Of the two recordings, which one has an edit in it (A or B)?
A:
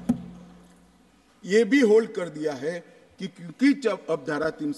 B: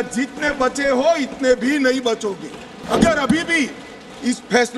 B